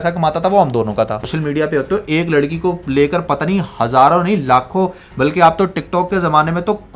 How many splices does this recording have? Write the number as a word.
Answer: one